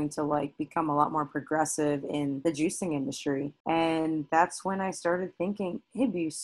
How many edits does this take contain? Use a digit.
2